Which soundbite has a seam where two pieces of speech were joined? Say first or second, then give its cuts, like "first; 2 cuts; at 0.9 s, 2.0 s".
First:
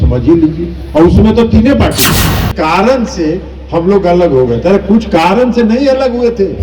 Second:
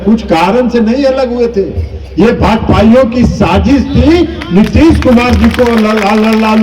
first; 1 cut; at 2.5 s